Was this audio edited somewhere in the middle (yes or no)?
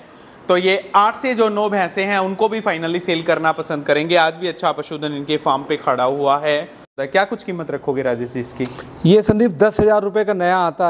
yes